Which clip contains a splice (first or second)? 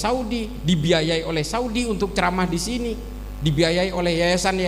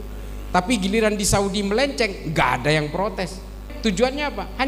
second